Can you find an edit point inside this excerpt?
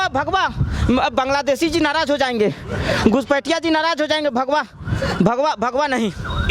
no; 0 cuts

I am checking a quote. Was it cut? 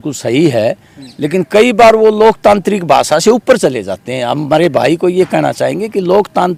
no; 0 cuts

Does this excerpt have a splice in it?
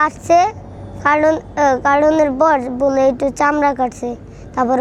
no; 0 cuts

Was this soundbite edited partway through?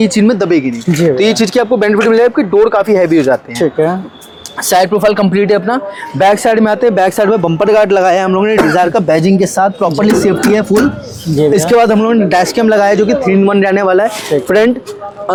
no; 0 cuts

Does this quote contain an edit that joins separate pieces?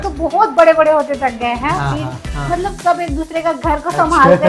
yes; 1 cut; at 2.2 s

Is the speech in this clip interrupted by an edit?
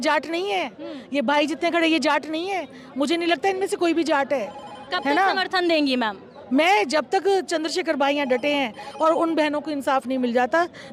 no; 0 cuts

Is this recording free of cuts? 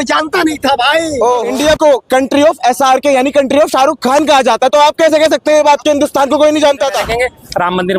no; 2 cuts; at 1.4 s, 7.0 s

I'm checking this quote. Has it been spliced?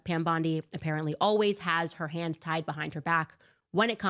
no; 0 cuts

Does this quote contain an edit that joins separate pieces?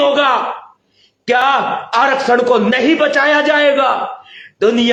no; 0 cuts

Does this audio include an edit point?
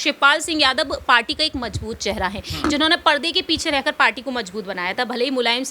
no; 0 cuts

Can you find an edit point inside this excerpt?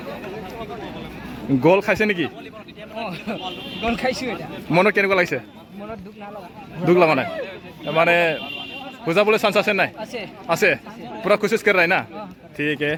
no; 0 cuts

